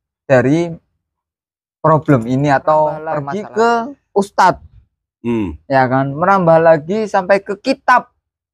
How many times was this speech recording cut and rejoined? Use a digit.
1